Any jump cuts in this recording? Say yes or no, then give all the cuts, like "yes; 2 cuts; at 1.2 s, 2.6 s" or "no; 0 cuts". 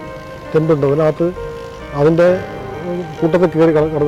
no; 0 cuts